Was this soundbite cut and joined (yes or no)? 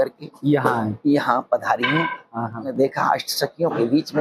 yes